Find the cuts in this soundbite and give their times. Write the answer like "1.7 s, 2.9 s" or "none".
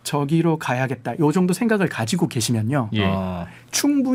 none